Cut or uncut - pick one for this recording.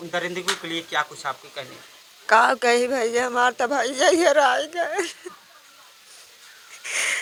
uncut